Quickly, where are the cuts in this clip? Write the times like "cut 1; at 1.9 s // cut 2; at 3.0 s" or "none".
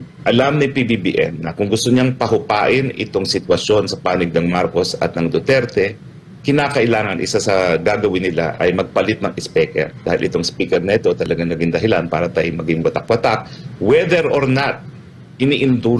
none